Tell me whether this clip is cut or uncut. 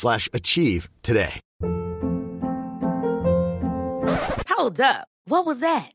cut